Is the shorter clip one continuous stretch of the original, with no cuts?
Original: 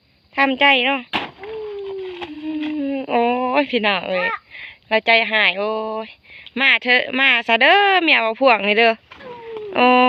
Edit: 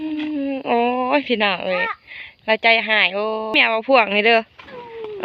no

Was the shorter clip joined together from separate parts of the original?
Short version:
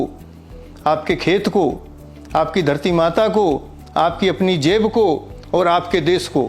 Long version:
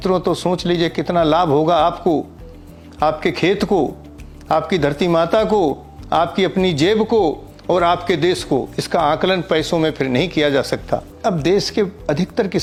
no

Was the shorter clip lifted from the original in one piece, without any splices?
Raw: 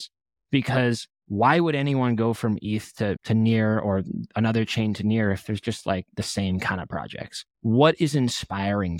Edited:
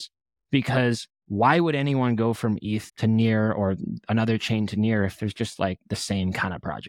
no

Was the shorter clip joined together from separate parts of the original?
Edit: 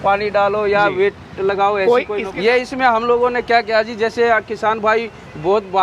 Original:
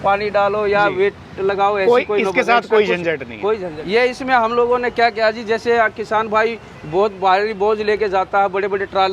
yes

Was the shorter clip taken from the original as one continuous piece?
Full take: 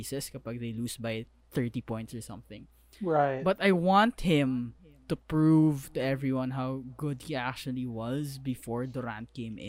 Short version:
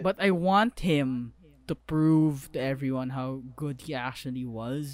yes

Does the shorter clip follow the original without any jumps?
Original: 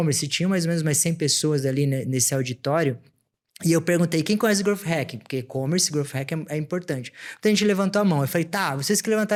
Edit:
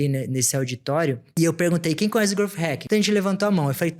no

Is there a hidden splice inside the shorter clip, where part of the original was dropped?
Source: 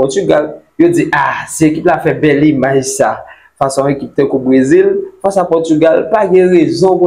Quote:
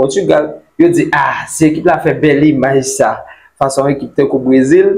no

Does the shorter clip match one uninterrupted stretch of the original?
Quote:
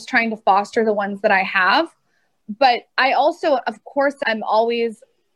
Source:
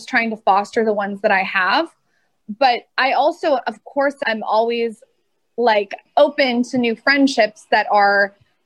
yes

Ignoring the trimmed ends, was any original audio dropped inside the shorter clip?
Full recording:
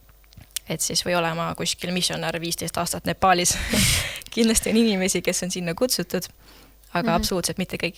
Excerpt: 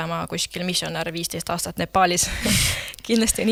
no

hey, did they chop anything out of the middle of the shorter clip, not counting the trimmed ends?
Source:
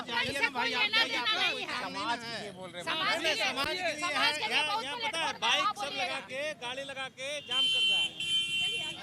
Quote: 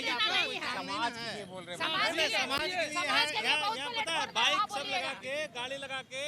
no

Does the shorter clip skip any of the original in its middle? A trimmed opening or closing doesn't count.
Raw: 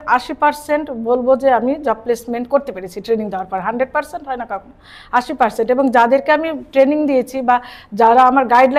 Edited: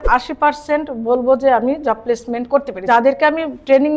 yes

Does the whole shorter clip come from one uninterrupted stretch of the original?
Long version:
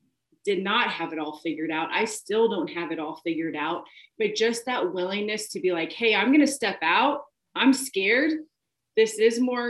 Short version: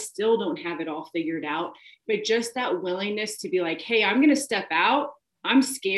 yes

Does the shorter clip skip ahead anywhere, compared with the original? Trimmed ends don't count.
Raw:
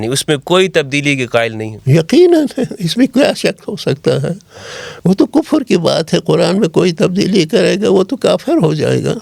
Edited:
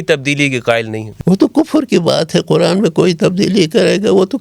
yes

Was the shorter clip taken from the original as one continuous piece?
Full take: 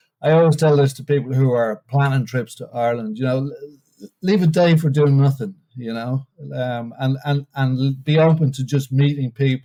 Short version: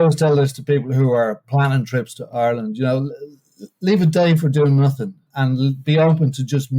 no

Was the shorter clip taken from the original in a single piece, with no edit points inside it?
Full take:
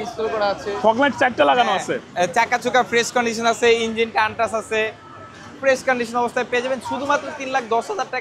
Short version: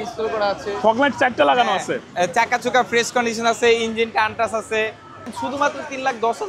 no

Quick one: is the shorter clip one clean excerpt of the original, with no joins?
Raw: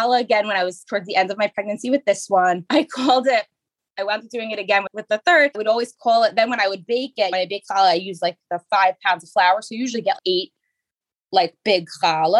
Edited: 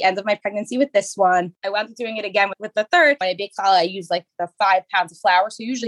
no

